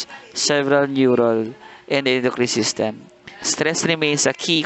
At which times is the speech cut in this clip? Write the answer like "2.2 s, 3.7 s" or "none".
3.6 s